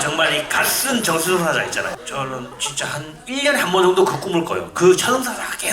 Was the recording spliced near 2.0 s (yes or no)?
yes